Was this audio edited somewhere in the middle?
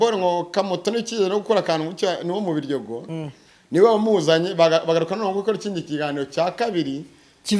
no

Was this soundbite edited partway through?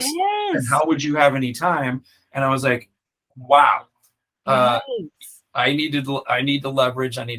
no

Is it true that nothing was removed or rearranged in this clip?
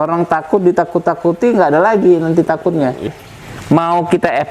no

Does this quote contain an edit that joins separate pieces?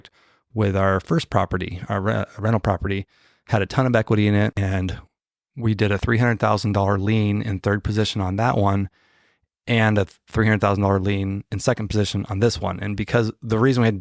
yes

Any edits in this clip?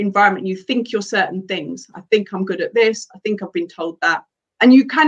no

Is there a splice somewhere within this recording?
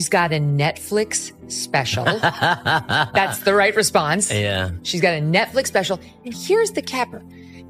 no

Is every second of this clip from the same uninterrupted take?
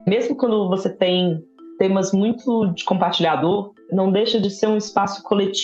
no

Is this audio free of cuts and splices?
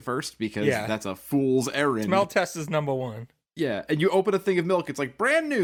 yes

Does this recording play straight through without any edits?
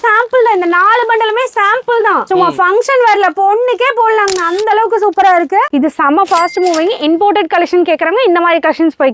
no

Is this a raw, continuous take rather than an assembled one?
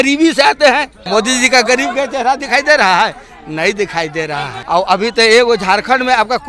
no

